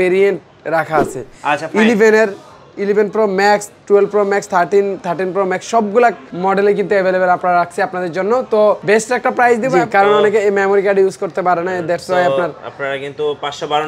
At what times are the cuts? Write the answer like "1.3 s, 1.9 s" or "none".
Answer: 6.3 s, 8.8 s, 9.7 s